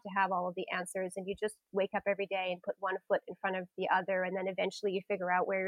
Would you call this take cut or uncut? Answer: uncut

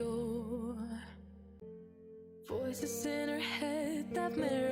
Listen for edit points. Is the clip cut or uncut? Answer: cut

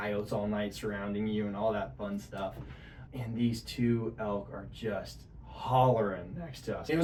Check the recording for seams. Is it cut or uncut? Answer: uncut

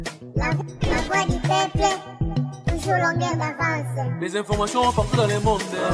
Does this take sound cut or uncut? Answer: uncut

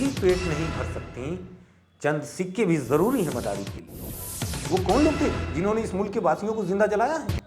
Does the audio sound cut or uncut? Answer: cut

